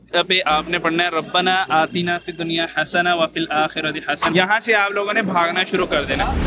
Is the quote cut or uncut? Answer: cut